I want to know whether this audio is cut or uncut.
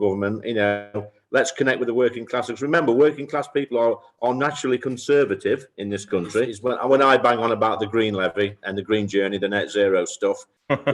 cut